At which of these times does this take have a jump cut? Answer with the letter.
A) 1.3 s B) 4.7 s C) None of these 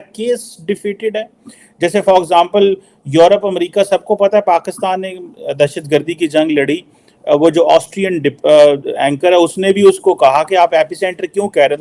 C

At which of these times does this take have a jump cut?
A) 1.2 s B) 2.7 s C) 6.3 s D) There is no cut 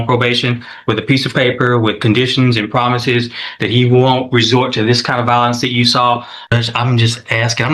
C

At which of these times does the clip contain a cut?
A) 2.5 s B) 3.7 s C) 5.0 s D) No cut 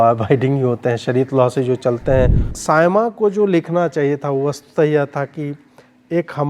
A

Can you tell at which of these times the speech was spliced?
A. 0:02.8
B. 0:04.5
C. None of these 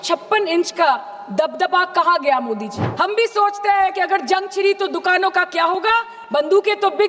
A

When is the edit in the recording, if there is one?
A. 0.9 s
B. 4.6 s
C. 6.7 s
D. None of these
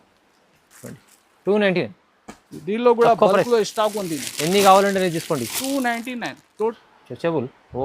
C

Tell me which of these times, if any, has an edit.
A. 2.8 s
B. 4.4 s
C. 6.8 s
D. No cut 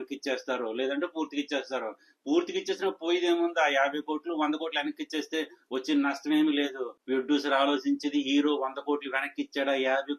C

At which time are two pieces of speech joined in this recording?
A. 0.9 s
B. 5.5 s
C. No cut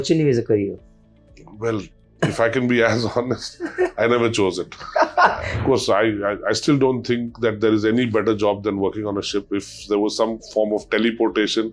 B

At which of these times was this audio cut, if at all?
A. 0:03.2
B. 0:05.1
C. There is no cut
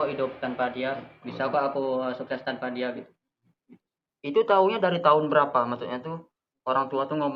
C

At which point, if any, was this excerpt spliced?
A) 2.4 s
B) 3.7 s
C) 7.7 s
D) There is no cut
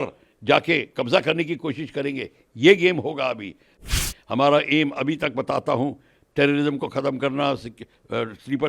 B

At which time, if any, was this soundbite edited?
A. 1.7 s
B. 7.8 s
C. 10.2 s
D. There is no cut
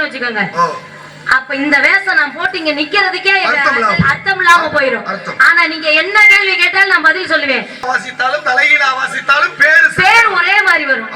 B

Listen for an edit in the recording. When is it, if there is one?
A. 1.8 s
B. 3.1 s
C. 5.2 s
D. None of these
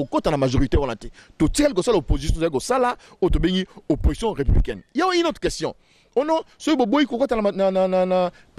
D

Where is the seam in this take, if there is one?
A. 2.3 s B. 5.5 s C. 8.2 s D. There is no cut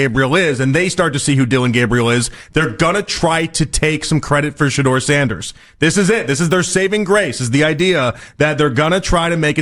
D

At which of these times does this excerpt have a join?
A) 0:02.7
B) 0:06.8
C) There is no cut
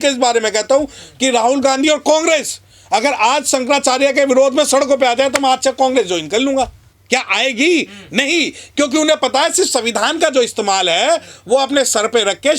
C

